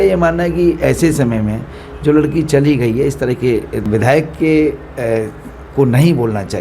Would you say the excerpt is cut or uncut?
cut